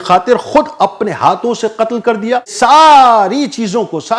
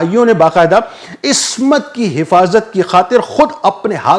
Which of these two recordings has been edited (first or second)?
first